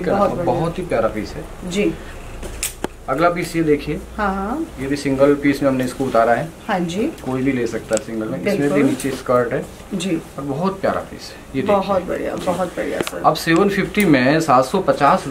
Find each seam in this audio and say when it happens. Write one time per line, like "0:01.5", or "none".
none

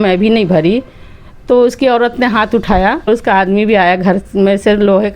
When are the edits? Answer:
0:03.1

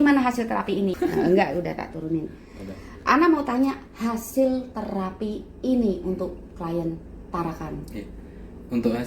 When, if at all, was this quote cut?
0:00.9

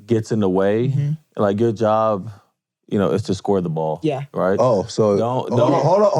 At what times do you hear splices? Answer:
none

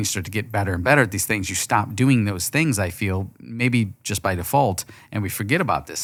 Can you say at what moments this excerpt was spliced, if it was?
none

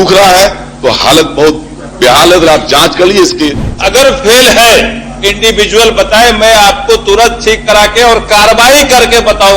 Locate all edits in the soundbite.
0:03.6

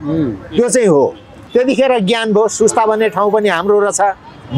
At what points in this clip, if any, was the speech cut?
0:01.4

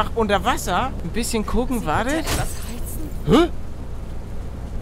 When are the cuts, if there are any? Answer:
0:01.0

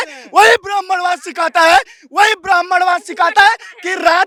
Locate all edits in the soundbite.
none

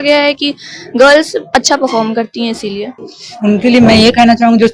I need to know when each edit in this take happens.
0:02.9

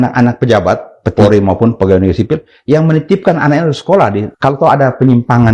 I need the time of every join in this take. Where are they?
0:01.1
0:04.3

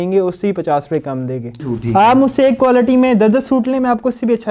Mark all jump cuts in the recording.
0:01.6

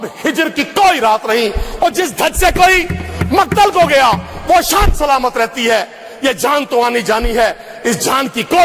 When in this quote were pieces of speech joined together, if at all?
none

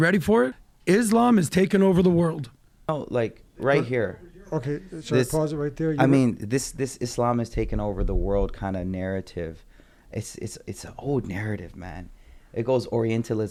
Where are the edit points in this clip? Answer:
none

